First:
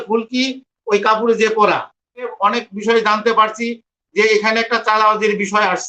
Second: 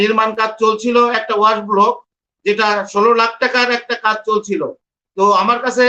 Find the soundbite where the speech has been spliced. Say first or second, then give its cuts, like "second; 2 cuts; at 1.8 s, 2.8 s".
first; 1 cut; at 2.3 s